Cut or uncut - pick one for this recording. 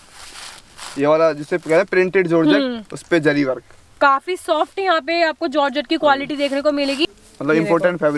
cut